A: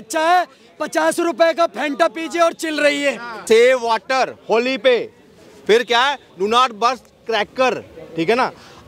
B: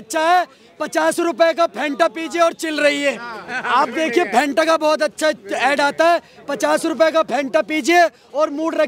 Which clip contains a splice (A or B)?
A